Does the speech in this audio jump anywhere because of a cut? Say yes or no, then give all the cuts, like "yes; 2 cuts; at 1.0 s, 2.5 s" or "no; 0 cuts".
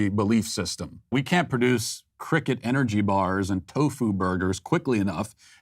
yes; 1 cut; at 1.1 s